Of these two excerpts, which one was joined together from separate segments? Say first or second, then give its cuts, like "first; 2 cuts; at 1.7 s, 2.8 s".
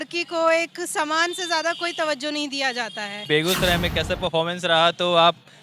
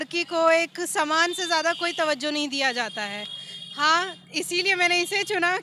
first; 1 cut; at 3.2 s